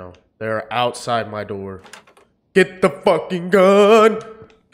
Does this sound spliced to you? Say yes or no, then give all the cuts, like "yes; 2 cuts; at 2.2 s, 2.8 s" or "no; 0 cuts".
no; 0 cuts